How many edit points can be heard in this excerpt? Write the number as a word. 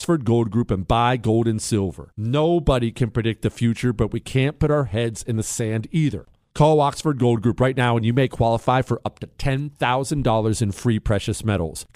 one